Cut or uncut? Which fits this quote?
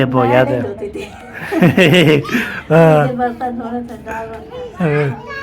uncut